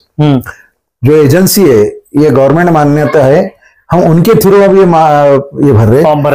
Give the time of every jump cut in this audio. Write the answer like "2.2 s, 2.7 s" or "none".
none